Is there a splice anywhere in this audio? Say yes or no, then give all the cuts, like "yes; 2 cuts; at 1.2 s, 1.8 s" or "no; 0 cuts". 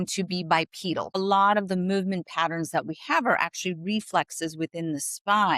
yes; 1 cut; at 1.2 s